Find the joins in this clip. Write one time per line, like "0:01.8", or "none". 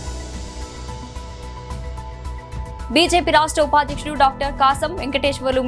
0:01.8
0:02.9